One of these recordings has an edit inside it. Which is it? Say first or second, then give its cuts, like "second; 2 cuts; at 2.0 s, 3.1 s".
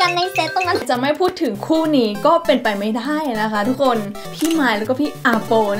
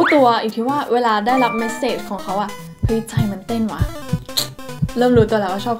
first; 2 cuts; at 0.8 s, 4.3 s